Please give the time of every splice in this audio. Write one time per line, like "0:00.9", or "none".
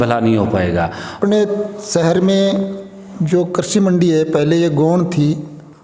0:01.2